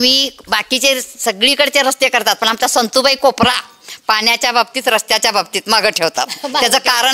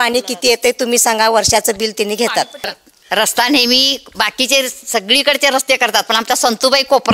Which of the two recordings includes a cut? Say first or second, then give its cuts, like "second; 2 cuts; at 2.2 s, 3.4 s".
second; 1 cut; at 2.6 s